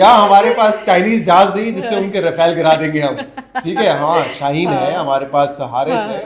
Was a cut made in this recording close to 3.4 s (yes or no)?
no